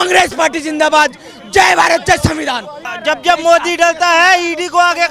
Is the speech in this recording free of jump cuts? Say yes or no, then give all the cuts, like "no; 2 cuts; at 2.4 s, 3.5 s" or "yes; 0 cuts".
no; 1 cut; at 2.9 s